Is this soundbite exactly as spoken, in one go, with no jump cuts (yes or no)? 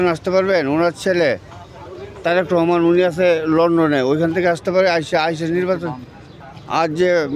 yes